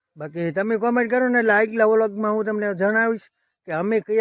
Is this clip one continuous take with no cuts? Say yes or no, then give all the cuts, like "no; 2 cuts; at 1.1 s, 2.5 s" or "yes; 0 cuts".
yes; 0 cuts